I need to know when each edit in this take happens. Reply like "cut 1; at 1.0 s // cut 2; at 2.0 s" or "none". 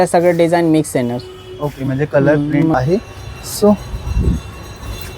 cut 1; at 2.7 s